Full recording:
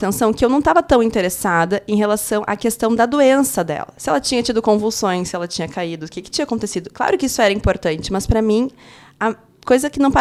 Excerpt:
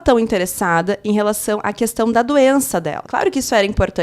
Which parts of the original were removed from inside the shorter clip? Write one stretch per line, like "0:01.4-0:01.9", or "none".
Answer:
0:03.9-0:06.9